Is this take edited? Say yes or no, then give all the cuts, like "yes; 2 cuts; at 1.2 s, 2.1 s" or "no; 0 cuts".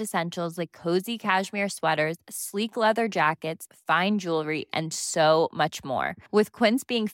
no; 0 cuts